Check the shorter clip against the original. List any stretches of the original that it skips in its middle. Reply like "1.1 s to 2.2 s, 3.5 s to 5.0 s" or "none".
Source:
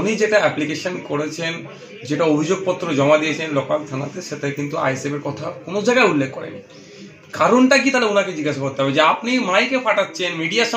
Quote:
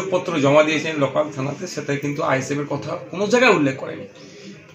none